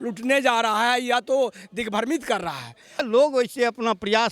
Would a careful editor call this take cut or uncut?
cut